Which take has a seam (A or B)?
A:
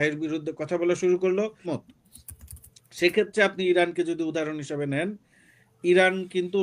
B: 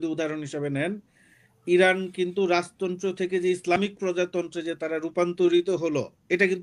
A